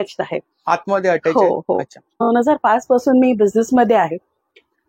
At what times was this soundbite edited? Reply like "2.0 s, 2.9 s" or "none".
2.3 s

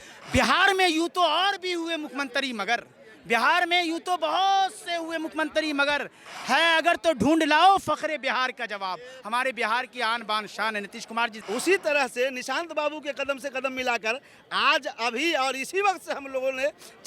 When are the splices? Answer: 11.4 s

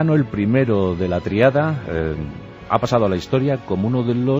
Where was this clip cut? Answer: 2.4 s

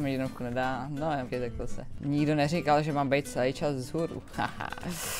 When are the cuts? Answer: none

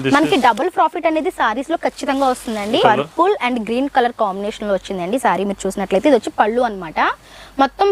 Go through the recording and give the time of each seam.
2.8 s

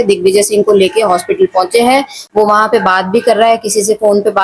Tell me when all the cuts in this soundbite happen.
none

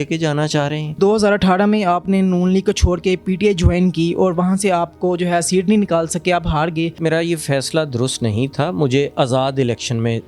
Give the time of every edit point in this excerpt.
1.0 s, 7.0 s

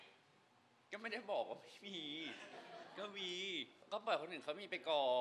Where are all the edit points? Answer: 3.8 s

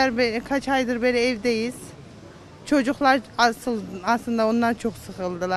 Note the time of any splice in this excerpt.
none

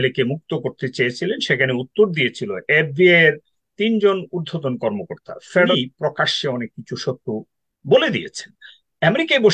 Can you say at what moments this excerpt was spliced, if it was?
5.7 s

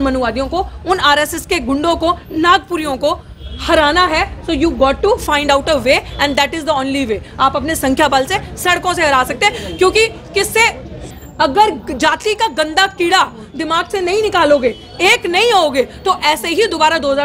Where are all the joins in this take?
11.0 s

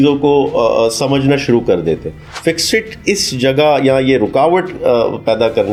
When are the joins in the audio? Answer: none

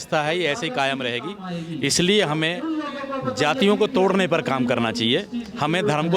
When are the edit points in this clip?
none

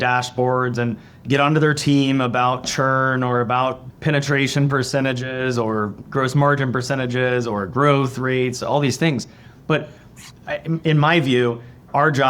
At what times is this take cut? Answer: none

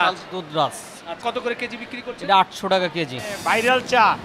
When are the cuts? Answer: 1.2 s, 3.3 s

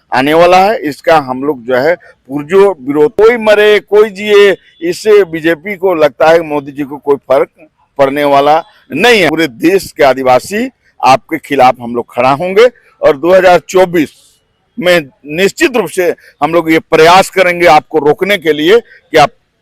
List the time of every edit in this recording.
3.1 s, 9.3 s

